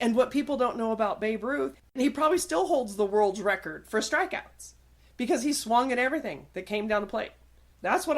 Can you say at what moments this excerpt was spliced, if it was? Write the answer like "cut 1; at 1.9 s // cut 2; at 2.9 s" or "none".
cut 1; at 2.0 s